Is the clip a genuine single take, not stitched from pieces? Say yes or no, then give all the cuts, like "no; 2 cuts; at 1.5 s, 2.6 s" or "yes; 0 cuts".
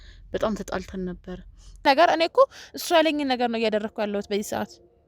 no; 1 cut; at 1.8 s